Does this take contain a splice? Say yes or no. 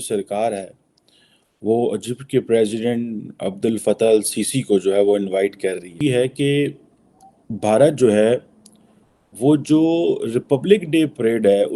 no